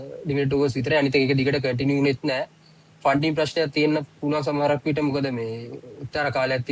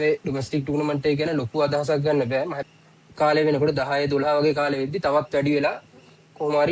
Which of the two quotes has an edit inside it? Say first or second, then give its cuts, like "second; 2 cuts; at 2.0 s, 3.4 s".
second; 1 cut; at 2.6 s